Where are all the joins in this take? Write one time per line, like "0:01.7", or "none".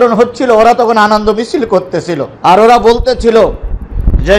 0:02.3